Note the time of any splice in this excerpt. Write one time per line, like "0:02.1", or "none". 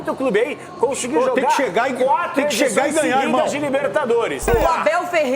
0:04.5